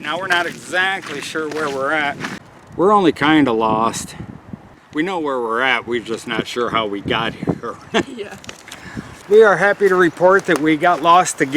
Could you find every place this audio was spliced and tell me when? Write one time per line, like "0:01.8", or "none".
0:02.3
0:04.8
0:09.1